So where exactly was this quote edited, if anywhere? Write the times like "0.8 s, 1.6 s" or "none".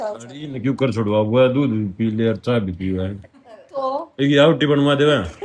none

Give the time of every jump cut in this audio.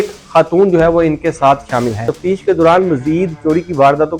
2.1 s

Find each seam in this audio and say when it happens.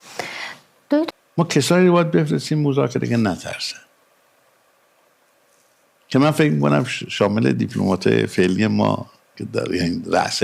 1.0 s

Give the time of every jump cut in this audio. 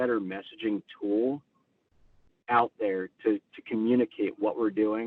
none

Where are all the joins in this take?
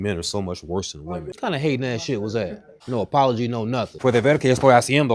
1.3 s, 2.7 s, 3.9 s

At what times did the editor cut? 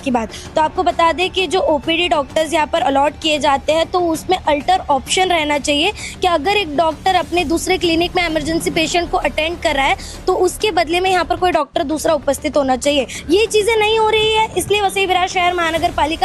13.2 s

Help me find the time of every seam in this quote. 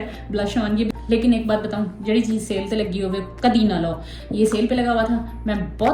0.9 s

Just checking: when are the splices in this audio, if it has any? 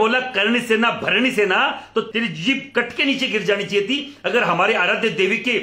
2.1 s

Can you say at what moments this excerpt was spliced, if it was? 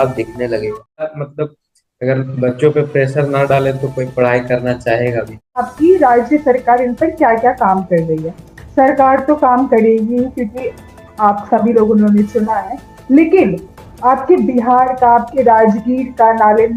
1.1 s, 5.7 s

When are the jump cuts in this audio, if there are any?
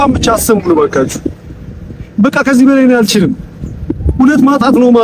none

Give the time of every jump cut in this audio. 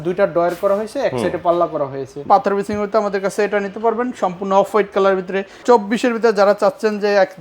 2.2 s, 5.6 s

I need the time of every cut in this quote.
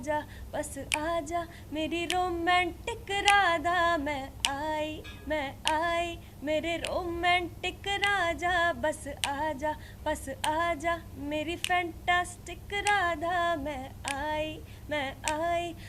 none

